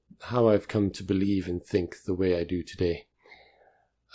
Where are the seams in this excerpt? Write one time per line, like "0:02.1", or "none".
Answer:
0:01.1